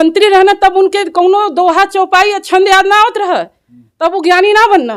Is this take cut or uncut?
uncut